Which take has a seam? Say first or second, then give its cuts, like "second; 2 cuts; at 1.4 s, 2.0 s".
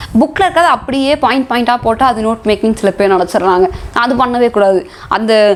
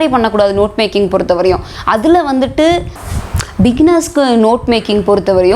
second; 1 cut; at 3.0 s